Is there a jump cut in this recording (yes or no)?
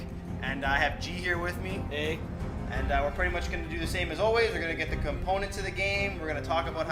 no